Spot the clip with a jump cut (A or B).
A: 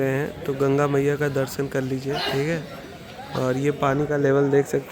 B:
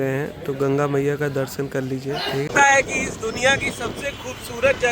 B